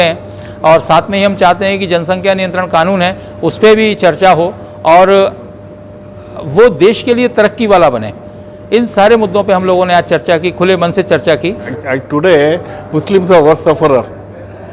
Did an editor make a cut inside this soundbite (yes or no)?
yes